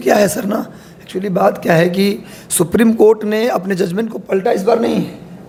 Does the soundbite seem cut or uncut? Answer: uncut